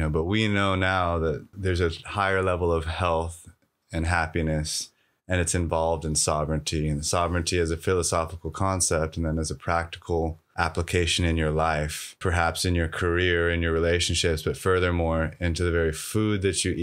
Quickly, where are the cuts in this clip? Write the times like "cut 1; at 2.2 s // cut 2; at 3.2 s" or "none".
cut 1; at 1.5 s // cut 2; at 10.4 s // cut 3; at 12.2 s